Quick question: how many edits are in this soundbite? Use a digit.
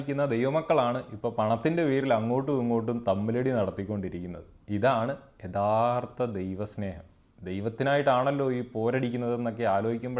0